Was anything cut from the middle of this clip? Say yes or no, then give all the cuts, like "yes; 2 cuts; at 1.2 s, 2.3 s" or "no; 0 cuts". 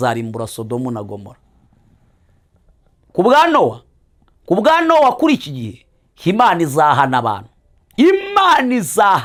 no; 0 cuts